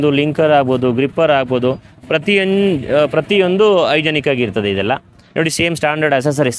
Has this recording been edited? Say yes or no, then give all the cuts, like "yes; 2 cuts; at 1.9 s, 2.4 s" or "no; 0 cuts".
no; 0 cuts